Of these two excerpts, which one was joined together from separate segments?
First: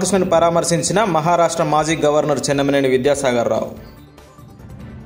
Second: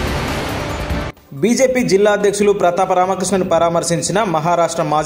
second; 1 cut; at 1.1 s

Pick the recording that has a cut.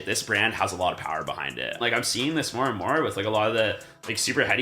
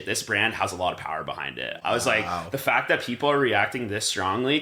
first; 1 cut; at 1.7 s

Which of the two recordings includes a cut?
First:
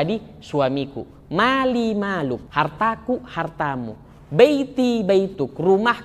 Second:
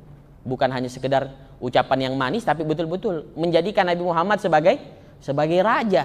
first; 1 cut; at 2.5 s

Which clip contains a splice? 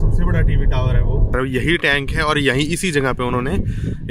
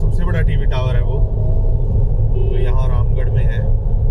first; 1 cut; at 1.3 s

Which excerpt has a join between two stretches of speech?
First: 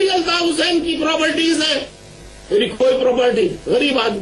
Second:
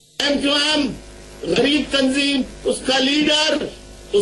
first; 1 cut; at 1.2 s

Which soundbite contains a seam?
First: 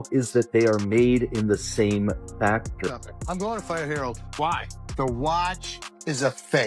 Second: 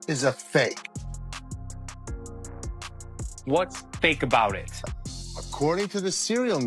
first; 1 cut; at 2.7 s

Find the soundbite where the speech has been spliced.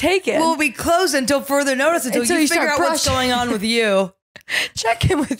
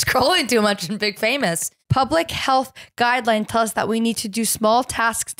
second; 1 cut; at 1.7 s

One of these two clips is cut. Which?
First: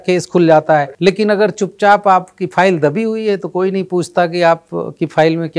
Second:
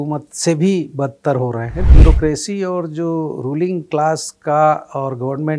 second; 1 cut; at 1.9 s

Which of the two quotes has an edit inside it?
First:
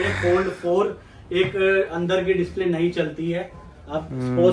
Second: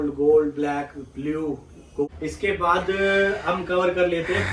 second; 1 cut; at 2.0 s

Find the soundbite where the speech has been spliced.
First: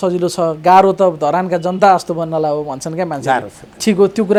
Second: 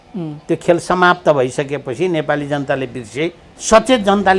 second; 1 cut; at 3.5 s

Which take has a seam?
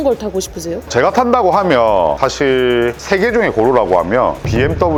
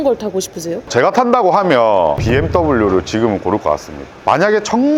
second; 2 cuts; at 2.2 s, 4.2 s

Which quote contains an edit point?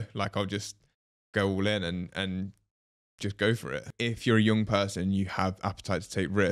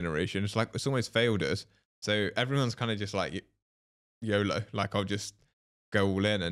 first; 1 cut; at 3.9 s

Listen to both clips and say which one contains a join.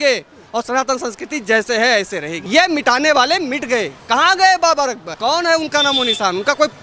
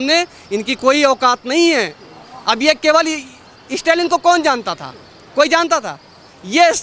first; 3 cuts; at 2.4 s, 4.0 s, 5.2 s

